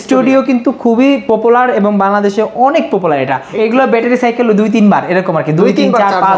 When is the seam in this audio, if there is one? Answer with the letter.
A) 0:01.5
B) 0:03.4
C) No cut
B